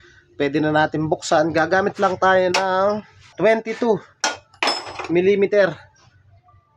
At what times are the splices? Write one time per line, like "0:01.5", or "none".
0:03.4